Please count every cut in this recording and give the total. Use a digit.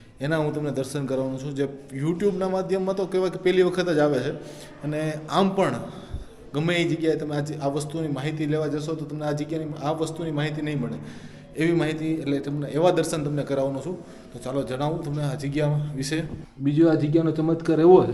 1